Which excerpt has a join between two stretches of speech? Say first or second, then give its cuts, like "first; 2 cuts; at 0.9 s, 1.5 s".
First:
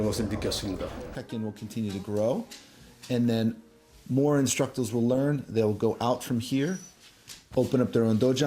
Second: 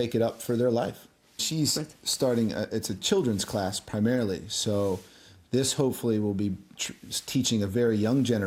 first; 1 cut; at 1.1 s